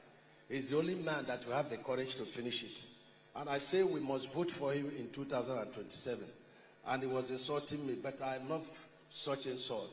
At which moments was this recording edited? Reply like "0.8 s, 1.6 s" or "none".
none

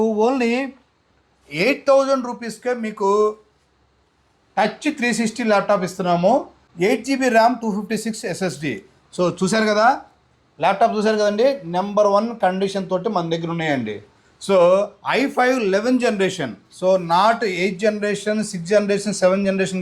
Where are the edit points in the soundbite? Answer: 6.6 s

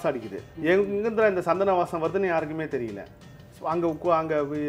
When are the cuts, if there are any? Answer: none

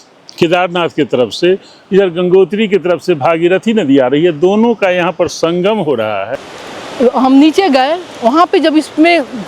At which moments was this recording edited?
6.3 s

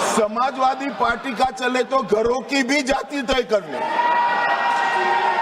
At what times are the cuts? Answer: none

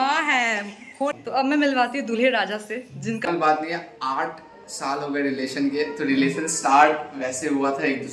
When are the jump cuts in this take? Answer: 1.1 s, 3.2 s

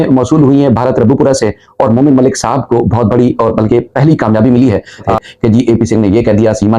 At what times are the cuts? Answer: 5.1 s

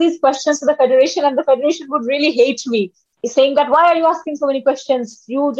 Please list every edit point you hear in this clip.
3.2 s

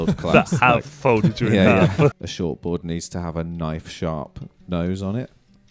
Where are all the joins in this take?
2.1 s

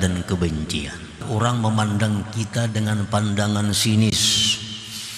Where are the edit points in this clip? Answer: 1.3 s

